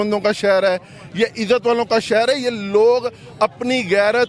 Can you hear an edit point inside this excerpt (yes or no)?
no